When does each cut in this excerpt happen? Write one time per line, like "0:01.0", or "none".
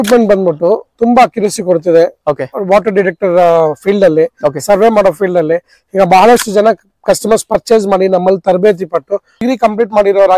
0:09.4